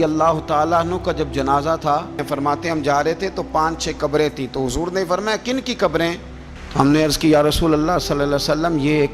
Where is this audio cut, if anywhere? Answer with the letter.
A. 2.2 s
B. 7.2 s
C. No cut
A